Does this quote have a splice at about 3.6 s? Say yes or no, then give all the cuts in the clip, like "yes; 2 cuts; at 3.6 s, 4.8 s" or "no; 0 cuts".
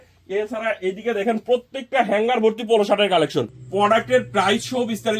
yes; 1 cut; at 3.6 s